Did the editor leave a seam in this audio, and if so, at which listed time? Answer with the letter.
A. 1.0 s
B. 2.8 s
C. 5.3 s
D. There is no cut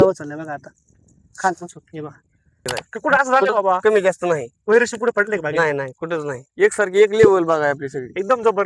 D